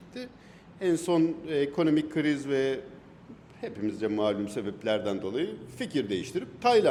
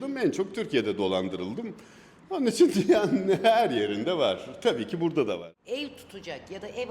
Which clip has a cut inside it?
second; 1 cut; at 5.4 s

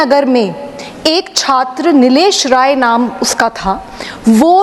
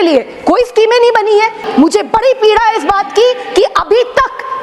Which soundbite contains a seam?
second; 1 cut; at 1.6 s

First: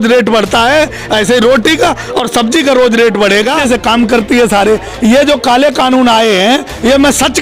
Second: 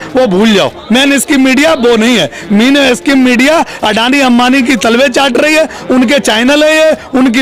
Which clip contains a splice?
first; 1 cut; at 3.6 s

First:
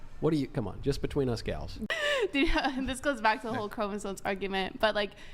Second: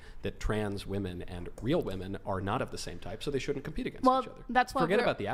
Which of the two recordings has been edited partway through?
first; 1 cut; at 1.9 s

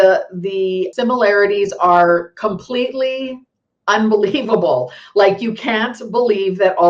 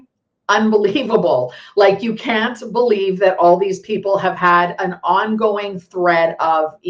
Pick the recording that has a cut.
first; 1 cut; at 0.9 s

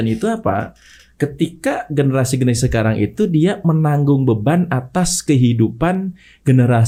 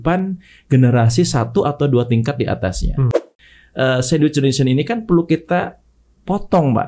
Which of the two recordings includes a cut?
second; 1 cut; at 3.4 s

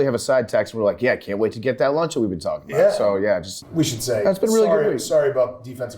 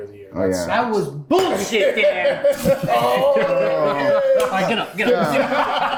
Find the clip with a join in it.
first; 1 cut; at 3.6 s

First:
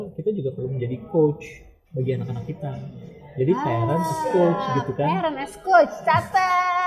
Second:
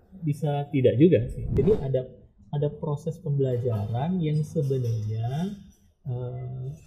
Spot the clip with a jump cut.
second; 1 cut; at 1.4 s

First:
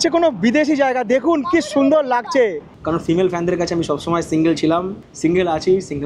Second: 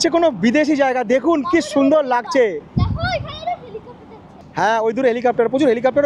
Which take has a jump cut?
first; 2 cuts; at 2.7 s, 5.0 s

